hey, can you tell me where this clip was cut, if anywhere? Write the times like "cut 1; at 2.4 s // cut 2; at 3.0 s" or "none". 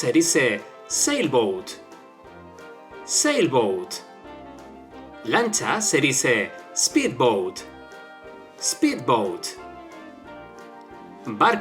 cut 1; at 9.4 s // cut 2; at 10.9 s